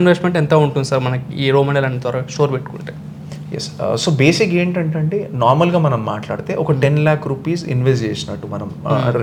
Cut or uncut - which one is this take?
uncut